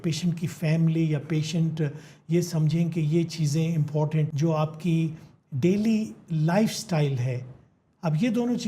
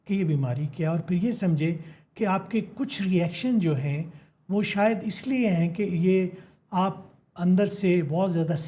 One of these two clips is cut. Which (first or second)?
first